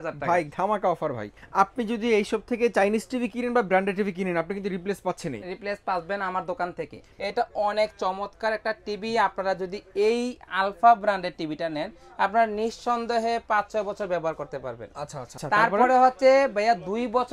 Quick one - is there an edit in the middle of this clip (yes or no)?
yes